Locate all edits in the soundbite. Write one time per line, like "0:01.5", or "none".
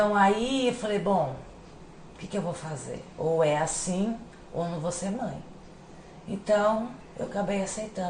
none